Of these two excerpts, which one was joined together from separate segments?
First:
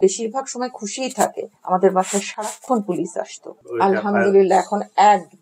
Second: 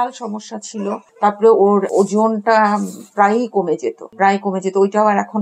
first; 2 cuts; at 1.6 s, 3.6 s

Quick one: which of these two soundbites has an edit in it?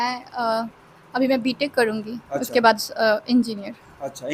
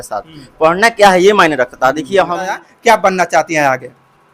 second; 1 cut; at 2.7 s

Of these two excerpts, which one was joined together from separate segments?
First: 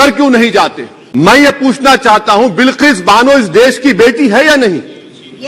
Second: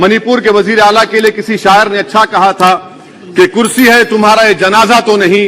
first; 1 cut; at 1.4 s

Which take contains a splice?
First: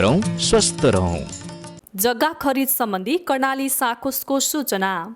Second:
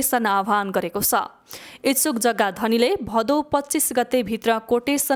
first; 1 cut; at 1.9 s

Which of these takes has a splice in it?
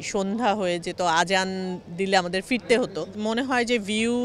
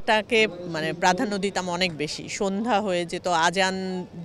first; 1 cut; at 3.1 s

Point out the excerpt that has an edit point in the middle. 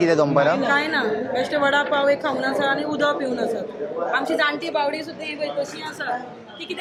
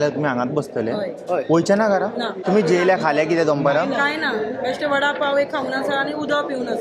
second; 1 cut; at 2.4 s

